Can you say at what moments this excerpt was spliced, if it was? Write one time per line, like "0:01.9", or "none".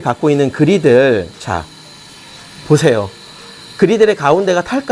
none